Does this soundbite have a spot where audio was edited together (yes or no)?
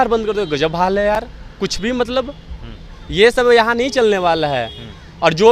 no